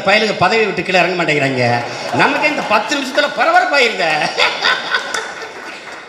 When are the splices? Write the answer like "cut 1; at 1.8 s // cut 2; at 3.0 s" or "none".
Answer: none